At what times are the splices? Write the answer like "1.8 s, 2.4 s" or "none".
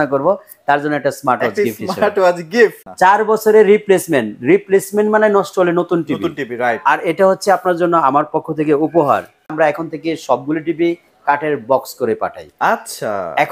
2.8 s, 9.5 s